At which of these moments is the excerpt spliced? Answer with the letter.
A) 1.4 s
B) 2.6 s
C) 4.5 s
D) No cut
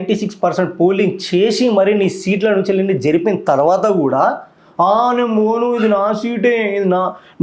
D